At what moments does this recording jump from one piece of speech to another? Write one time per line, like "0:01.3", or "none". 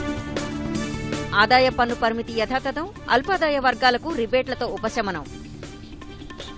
0:01.1